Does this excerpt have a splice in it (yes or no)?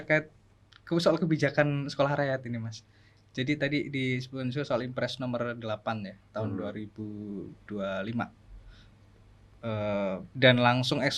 no